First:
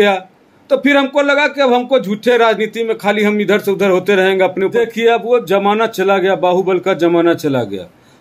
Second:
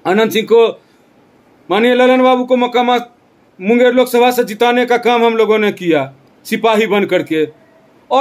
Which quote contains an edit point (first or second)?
first